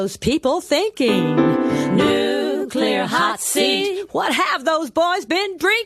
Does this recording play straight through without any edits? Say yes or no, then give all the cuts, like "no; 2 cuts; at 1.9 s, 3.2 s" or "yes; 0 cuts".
yes; 0 cuts